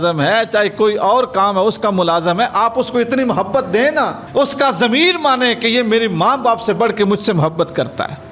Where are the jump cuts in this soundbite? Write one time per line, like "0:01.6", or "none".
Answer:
none

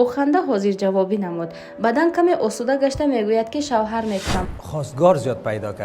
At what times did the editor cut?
0:04.5

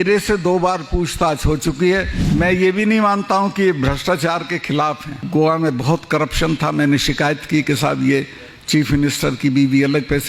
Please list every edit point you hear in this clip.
0:02.2
0:05.2

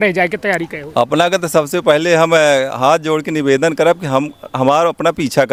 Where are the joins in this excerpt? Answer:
none

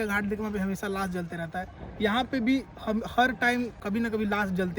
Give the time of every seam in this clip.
0:03.8

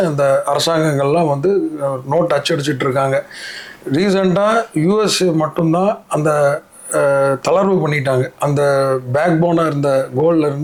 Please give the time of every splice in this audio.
none

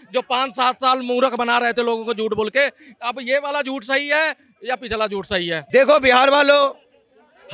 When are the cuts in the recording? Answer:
0:05.6

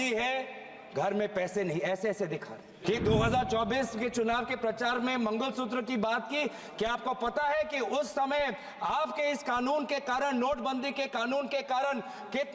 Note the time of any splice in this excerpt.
0:02.7

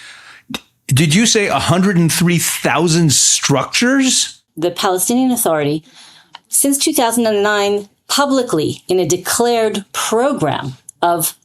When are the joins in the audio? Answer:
0:04.4

